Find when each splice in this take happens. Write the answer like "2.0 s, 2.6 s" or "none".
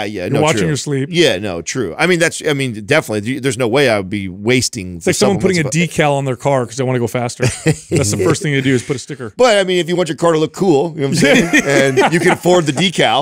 none